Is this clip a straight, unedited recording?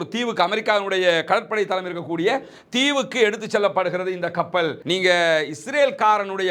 no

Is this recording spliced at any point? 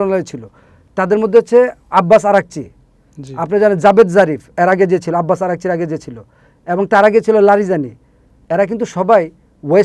no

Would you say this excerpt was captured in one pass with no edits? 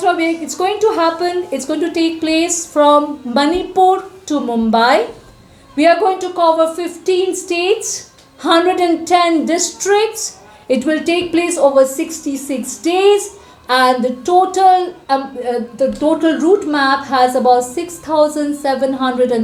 yes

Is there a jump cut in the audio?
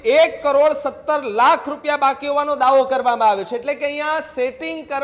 no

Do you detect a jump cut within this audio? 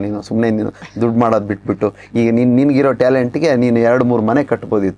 no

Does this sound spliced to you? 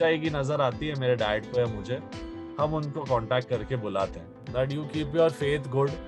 yes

